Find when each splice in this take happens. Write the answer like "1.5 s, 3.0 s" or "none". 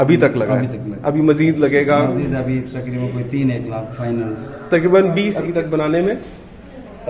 5.4 s

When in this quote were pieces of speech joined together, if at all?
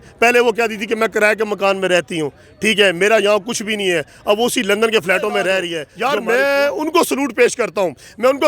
5.8 s

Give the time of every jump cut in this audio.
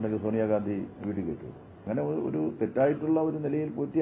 1.8 s

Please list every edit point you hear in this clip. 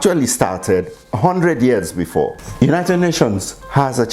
2.4 s

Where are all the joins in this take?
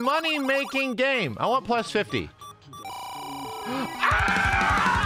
none

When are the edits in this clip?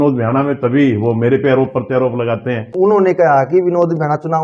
2.7 s

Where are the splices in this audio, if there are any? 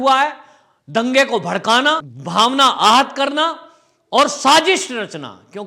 2.1 s

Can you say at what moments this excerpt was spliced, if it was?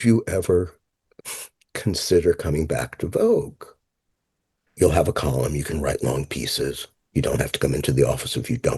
4.6 s

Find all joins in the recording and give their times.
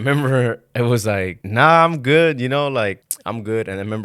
1.4 s, 3.1 s

